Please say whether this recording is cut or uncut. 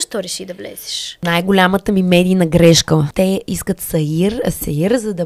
cut